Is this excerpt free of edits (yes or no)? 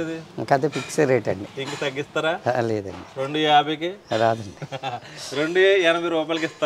yes